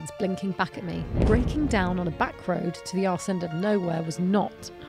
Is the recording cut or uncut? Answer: cut